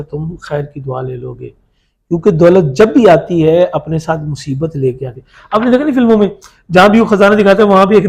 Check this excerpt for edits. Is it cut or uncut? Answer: uncut